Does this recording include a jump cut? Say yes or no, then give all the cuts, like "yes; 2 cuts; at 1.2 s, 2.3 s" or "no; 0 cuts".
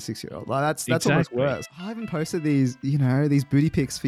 yes; 1 cut; at 1.6 s